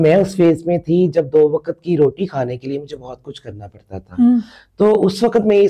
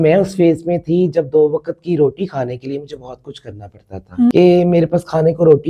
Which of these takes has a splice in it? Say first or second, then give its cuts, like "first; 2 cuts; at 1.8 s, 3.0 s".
second; 1 cut; at 4.3 s